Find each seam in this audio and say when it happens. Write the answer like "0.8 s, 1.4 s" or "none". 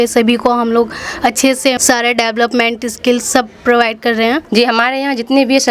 1.8 s, 4.4 s